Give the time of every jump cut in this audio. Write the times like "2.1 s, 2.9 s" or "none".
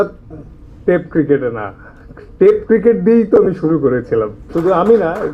4.4 s